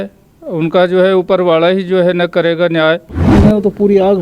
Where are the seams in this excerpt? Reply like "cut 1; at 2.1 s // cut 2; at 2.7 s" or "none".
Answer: cut 1; at 3.3 s